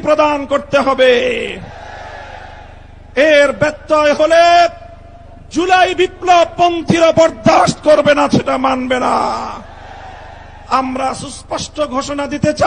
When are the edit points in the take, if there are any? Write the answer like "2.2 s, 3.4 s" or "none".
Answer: none